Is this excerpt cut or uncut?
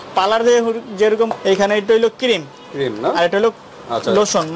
cut